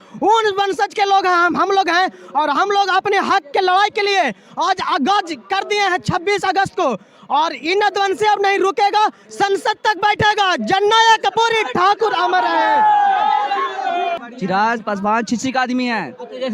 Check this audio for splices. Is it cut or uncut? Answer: cut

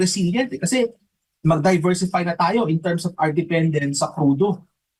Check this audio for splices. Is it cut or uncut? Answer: uncut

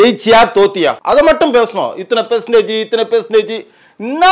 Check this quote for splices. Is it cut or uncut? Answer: cut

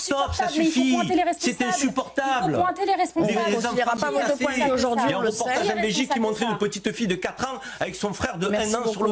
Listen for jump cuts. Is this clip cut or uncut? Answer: uncut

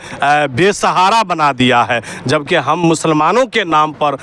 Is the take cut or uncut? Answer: uncut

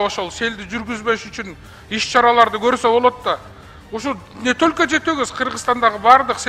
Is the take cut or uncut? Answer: uncut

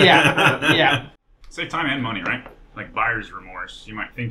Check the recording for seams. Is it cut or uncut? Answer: cut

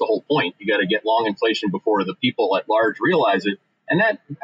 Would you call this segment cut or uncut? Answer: uncut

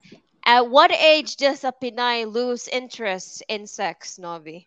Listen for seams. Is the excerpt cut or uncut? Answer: uncut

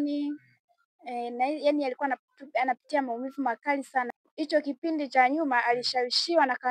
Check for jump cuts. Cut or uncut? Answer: cut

